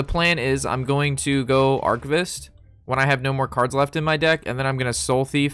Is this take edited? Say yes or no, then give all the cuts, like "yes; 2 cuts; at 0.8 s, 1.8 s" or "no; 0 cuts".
no; 0 cuts